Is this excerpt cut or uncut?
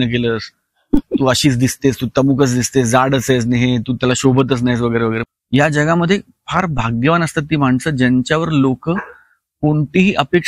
cut